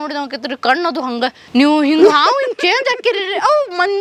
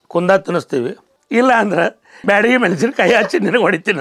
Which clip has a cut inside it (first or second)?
first